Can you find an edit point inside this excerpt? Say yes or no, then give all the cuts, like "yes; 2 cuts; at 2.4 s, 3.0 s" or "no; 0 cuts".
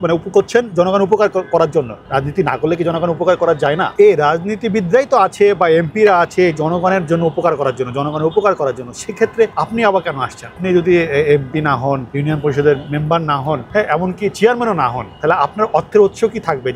yes; 2 cuts; at 3.9 s, 10.6 s